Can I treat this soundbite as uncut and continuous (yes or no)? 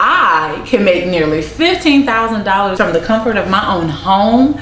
no